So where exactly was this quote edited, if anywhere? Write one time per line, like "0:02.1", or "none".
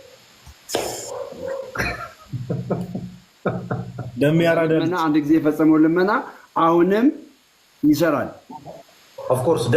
0:04.9